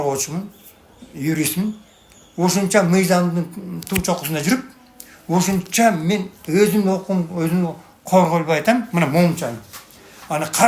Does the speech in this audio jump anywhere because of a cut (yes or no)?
no